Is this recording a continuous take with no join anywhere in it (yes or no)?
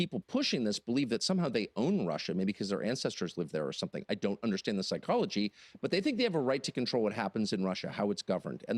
yes